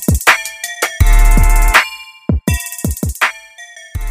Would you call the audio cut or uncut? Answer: cut